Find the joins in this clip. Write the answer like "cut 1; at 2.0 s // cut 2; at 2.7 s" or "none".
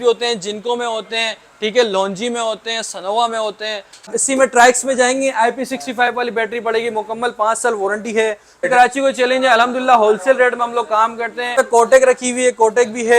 cut 1; at 4.1 s // cut 2; at 8.7 s // cut 3; at 11.5 s